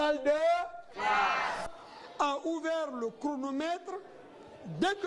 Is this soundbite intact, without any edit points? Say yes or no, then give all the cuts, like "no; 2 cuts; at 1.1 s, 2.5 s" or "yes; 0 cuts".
yes; 0 cuts